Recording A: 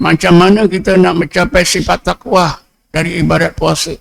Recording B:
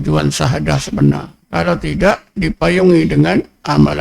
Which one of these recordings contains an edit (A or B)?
B